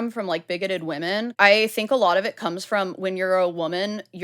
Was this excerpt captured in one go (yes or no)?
no